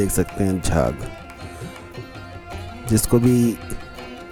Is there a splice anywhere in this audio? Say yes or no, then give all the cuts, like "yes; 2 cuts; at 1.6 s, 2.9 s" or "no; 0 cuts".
no; 0 cuts